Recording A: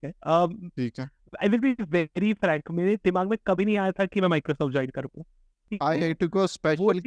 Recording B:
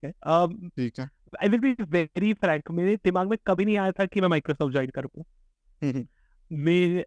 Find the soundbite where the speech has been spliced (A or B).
A